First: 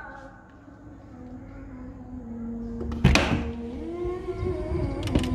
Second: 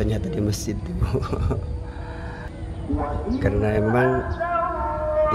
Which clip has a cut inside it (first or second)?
second